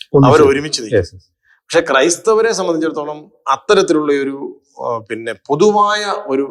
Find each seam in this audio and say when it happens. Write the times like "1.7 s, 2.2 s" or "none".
none